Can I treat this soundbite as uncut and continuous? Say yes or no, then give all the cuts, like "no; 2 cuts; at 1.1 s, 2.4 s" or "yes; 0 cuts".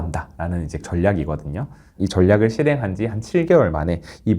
no; 1 cut; at 1.8 s